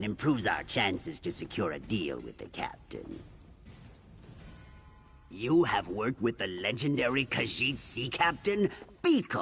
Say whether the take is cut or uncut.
cut